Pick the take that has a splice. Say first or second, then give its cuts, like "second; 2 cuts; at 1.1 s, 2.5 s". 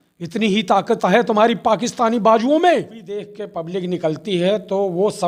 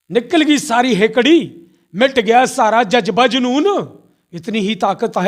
first; 1 cut; at 3.4 s